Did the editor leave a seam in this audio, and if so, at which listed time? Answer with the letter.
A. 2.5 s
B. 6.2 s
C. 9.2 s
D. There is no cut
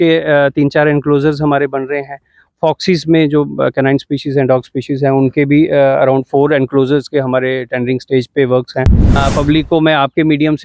C